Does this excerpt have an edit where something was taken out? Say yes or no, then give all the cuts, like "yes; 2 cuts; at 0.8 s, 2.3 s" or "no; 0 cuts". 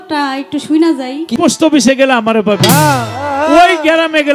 yes; 1 cut; at 1.4 s